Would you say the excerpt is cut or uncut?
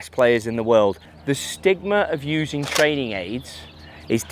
cut